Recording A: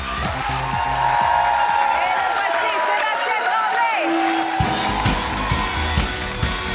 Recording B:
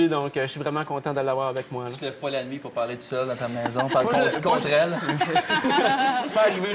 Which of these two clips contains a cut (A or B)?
B